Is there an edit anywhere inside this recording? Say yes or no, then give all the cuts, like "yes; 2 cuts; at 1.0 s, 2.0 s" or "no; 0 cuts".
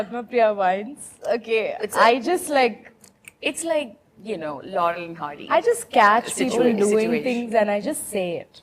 no; 0 cuts